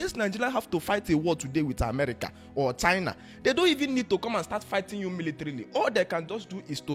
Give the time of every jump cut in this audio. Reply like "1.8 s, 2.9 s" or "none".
none